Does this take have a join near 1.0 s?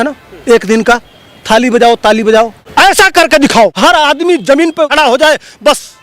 no; 3 cuts; at 2.6 s, 3.7 s, 4.9 s

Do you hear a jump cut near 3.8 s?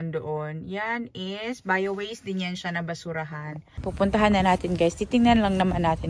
yes; 1 cut; at 3.8 s

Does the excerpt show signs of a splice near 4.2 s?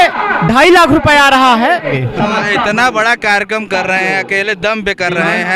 no; 1 cut; at 1.9 s

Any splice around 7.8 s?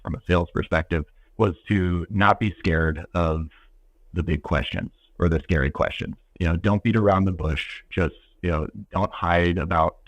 no; 1 cut; at 1.2 s

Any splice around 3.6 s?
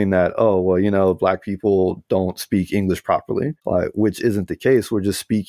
yes; 1 cut; at 3.6 s

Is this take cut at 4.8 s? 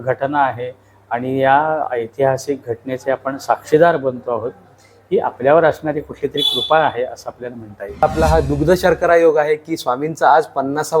no; 1 cut; at 8.0 s

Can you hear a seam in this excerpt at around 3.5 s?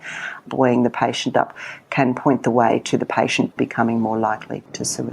yes; 1 cut; at 3.5 s

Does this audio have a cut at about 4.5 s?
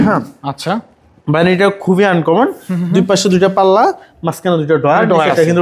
no; 0 cuts

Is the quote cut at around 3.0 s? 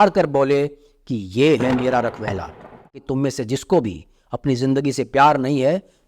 yes; 1 cut; at 3.0 s

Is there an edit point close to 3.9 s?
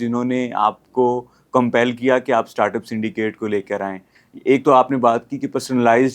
no; 0 cuts

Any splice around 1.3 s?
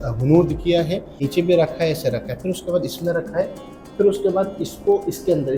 yes; 1 cut; at 1.3 s

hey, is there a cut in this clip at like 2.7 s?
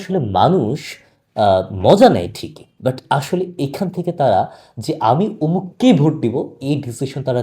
yes; 1 cut; at 2.7 s

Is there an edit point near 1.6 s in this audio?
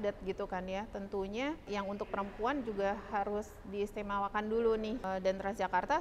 yes; 2 cuts; at 1.6 s, 5.0 s

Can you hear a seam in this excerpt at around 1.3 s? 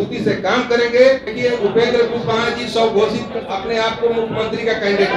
yes; 1 cut; at 1.3 s

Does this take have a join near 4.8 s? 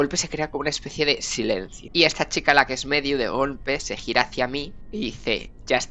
yes; 2 cuts; at 1.8 s, 4.8 s

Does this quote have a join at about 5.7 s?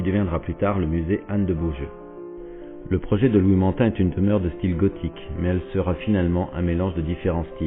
no; 1 cut; at 1.5 s

